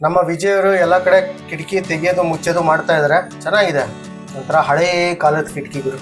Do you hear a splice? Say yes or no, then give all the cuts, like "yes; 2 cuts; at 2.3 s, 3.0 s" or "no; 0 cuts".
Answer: yes; 1 cut; at 3.4 s